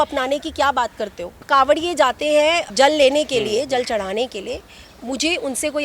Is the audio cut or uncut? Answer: cut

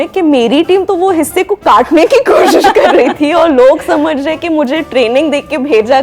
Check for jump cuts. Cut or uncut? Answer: uncut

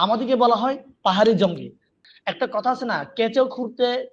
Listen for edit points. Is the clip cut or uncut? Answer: cut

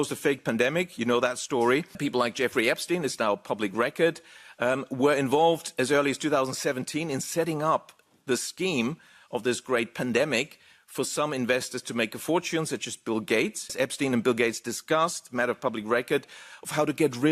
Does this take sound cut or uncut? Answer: cut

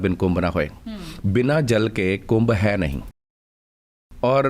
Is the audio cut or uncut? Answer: uncut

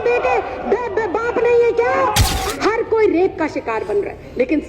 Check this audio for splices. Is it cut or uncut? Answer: cut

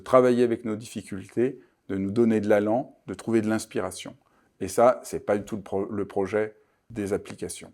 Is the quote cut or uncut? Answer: cut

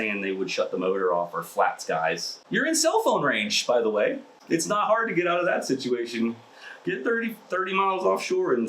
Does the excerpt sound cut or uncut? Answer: cut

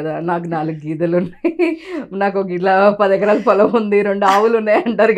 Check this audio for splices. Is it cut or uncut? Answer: uncut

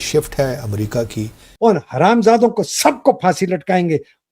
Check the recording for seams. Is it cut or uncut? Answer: cut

